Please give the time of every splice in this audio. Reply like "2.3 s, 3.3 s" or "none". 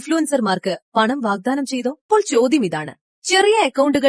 2.1 s